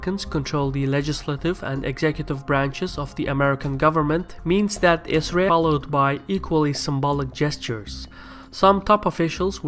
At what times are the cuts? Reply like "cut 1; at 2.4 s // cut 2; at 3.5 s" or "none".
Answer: none